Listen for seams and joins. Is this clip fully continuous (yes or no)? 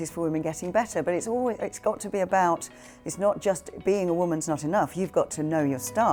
yes